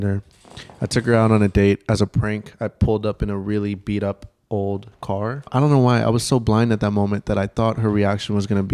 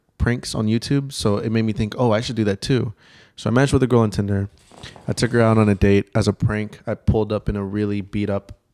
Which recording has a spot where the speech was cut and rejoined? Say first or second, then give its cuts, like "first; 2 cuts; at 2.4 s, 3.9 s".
first; 1 cut; at 5.5 s